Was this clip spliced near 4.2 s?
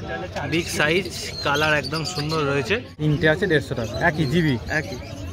no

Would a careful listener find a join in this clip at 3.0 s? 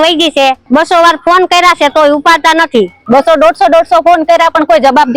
yes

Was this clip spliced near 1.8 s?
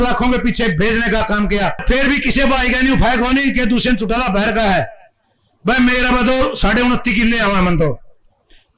yes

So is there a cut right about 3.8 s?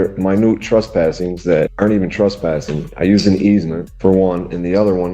yes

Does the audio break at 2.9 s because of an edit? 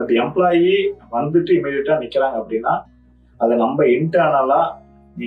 no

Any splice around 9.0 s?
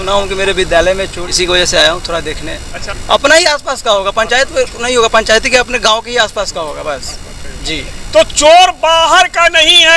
no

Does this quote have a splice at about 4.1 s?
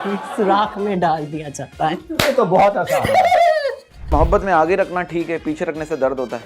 yes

